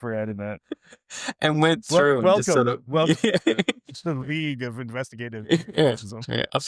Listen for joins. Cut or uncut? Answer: uncut